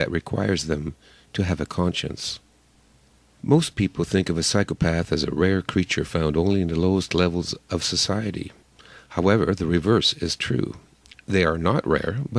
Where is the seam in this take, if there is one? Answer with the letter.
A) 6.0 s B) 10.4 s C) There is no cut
B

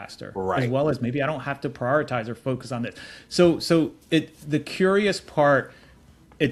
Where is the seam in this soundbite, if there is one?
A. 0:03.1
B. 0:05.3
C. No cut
C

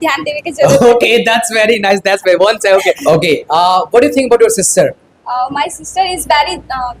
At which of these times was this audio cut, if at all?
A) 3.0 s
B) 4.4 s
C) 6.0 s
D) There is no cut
A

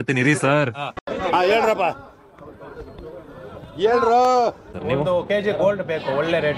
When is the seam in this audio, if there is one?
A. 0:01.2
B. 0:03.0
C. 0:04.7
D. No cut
C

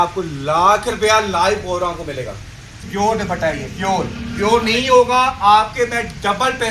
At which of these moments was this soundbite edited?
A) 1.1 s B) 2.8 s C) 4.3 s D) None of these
B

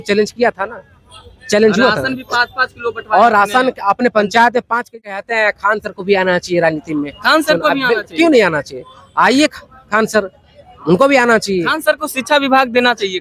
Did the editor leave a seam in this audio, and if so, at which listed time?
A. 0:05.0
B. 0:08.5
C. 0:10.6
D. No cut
A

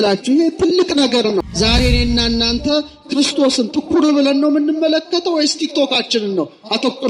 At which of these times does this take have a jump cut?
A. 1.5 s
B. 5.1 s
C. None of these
A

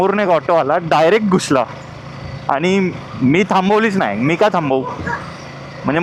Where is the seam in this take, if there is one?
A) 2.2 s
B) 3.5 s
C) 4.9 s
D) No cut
D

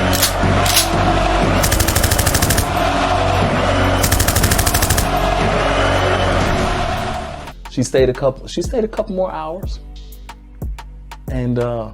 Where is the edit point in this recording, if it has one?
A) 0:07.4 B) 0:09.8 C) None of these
A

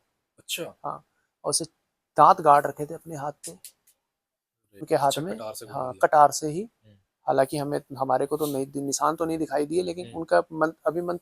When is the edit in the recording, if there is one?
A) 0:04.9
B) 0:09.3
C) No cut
A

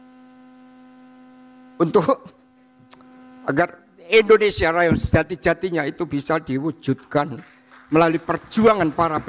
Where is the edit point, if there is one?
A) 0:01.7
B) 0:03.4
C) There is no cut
A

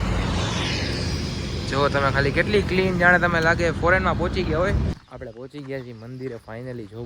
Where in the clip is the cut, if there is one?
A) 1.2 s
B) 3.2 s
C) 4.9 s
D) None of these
C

